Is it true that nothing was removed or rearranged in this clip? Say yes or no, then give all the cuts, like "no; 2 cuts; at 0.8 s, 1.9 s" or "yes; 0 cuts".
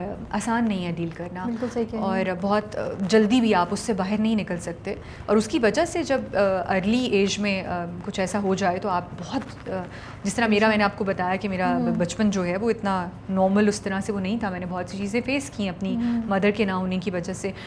yes; 0 cuts